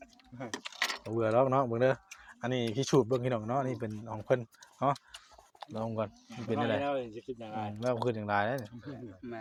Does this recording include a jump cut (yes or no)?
no